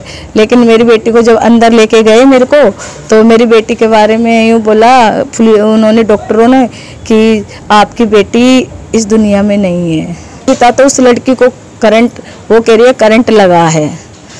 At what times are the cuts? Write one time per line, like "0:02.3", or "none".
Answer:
0:10.5